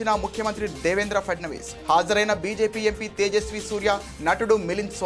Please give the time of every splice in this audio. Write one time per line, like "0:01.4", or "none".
none